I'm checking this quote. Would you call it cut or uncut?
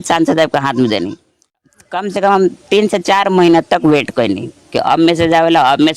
cut